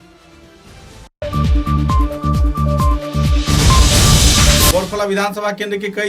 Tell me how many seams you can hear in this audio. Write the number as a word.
two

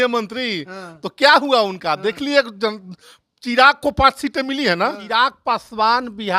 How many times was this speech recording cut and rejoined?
one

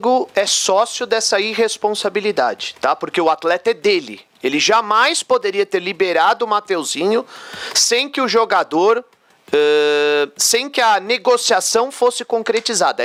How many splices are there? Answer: zero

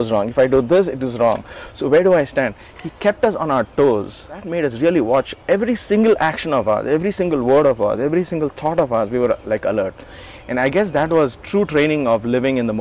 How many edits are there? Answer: one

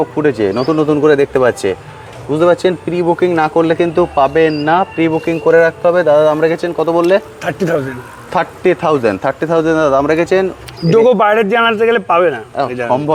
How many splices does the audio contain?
zero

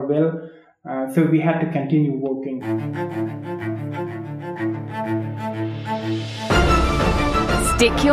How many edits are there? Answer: one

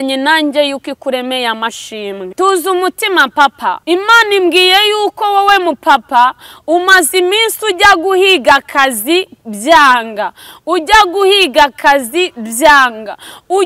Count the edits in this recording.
two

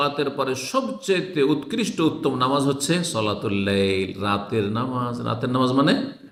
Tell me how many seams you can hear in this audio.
zero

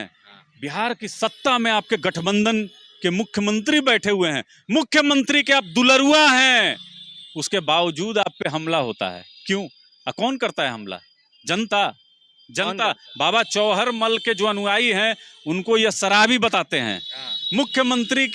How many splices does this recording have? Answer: zero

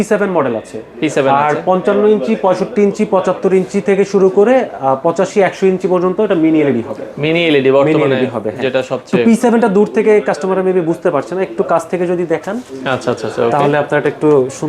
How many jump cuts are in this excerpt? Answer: zero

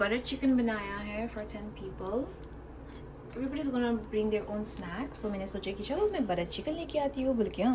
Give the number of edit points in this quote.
zero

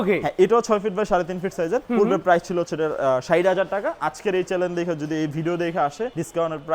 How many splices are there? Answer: zero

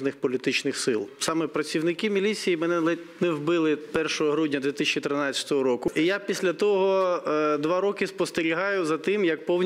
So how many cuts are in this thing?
two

